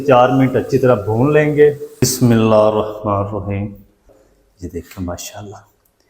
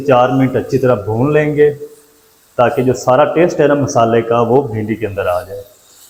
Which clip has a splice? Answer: first; 2 cuts; at 2.0 s, 4.2 s

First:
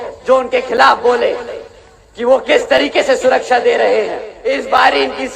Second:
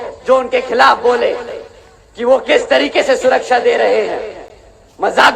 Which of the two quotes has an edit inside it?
first; 1 cut; at 4.3 s

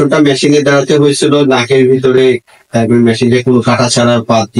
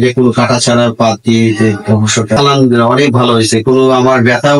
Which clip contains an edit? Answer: second; 1 cut; at 2.4 s

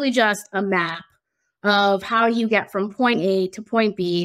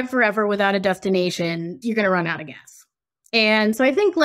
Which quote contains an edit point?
second; 1 cut; at 1.7 s

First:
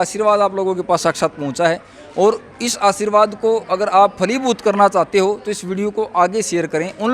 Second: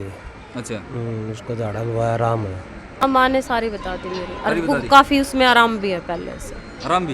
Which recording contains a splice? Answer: second; 1 cut; at 3.0 s

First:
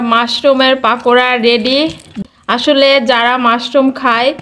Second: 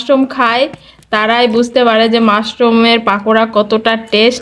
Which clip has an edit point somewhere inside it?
first; 1 cut; at 2.2 s

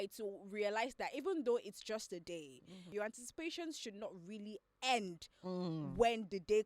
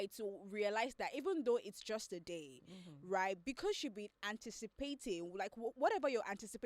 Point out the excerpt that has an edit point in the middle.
first; 1 cut; at 2.9 s

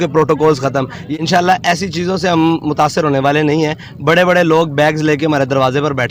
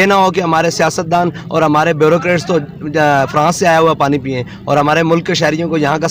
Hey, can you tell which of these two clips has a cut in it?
first; 1 cut; at 1.0 s

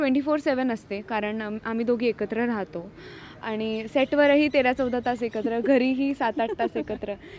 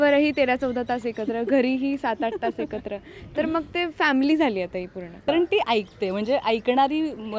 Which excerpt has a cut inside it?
second; 1 cut; at 5.3 s

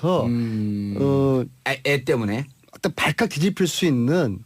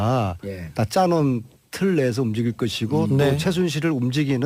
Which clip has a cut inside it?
first; 1 cut; at 3.2 s

